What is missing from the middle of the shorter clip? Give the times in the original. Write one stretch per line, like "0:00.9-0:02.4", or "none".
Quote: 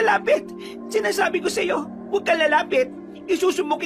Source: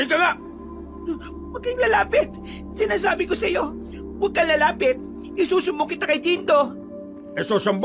0:03.8-0:04.0